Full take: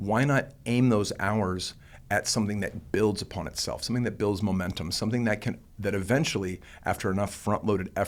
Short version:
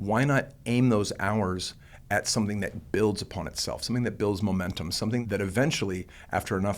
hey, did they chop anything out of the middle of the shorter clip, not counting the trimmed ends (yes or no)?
yes